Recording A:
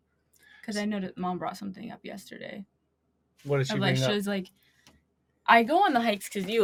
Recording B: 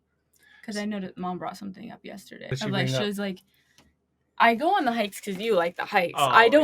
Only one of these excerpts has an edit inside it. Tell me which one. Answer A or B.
B